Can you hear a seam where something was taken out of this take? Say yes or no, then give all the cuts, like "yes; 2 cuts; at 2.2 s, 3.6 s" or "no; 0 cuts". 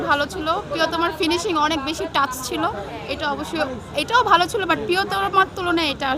no; 0 cuts